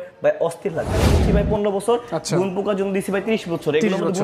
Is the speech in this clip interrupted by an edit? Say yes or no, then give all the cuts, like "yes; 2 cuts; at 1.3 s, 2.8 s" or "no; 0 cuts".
yes; 1 cut; at 1.2 s